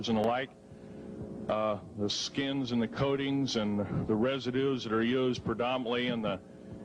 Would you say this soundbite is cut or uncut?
uncut